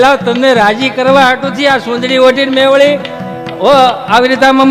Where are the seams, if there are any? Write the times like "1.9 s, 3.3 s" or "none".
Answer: none

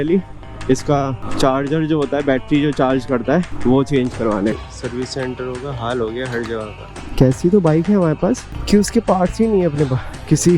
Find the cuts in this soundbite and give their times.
4.6 s, 7.0 s

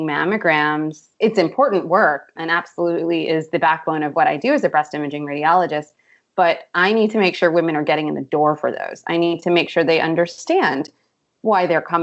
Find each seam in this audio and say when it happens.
none

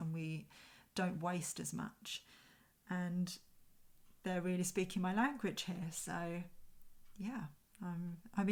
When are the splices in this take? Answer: none

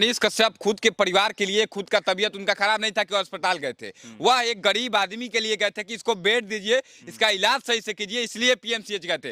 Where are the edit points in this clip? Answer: none

